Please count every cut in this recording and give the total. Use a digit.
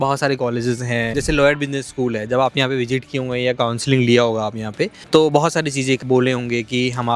2